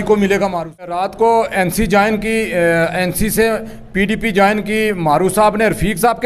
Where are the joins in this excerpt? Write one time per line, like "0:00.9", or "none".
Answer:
0:00.9